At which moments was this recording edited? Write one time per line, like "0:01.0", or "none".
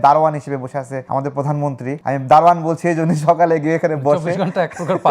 0:01.0
0:02.0